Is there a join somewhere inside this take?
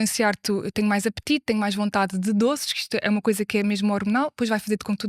no; 0 cuts

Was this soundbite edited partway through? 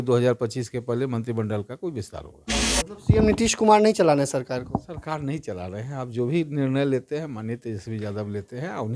no; 0 cuts

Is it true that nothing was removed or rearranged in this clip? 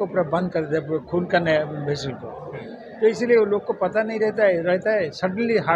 yes; 0 cuts

